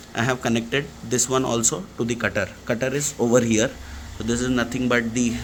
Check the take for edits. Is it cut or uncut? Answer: uncut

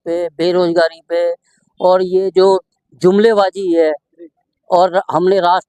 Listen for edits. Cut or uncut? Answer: uncut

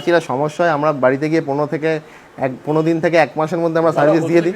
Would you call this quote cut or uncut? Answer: uncut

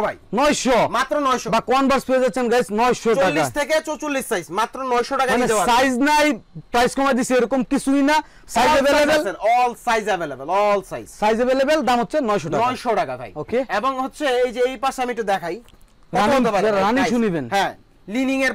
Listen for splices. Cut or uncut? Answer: uncut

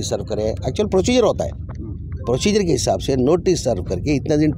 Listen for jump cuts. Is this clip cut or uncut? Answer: uncut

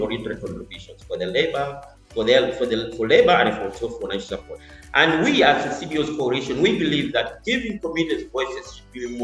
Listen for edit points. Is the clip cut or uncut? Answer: cut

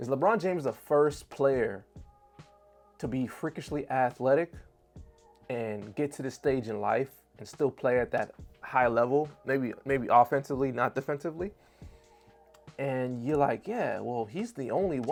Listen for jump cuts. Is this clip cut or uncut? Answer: uncut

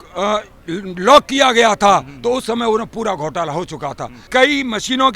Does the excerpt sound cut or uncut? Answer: cut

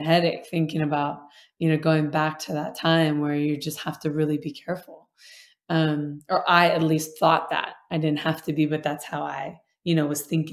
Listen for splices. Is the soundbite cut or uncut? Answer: uncut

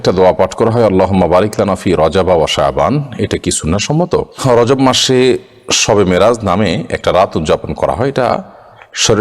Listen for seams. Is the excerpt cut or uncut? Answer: cut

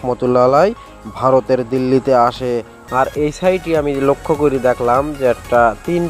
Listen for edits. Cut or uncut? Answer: cut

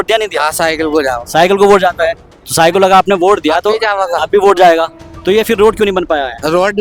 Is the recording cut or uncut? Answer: uncut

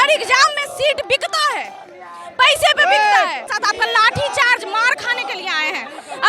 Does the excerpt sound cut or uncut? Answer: cut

